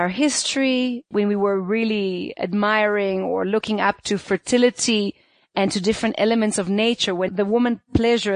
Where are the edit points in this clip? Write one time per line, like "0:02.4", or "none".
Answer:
0:01.1
0:07.3